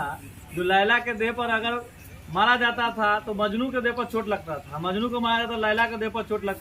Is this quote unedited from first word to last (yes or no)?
yes